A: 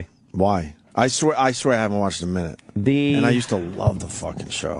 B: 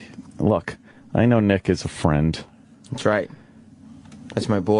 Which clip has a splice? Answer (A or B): A